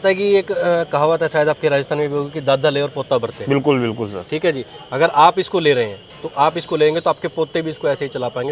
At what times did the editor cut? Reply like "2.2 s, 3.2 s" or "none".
none